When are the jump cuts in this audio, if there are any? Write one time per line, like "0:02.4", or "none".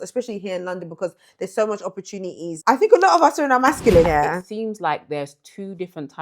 0:02.5
0:04.1